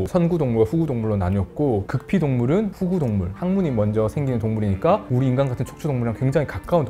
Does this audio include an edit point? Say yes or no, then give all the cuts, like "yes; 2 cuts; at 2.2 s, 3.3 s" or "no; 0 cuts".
no; 0 cuts